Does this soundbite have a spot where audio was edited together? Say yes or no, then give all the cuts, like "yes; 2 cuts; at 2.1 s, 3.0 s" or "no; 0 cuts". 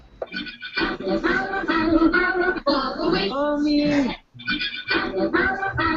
yes; 1 cut; at 2.3 s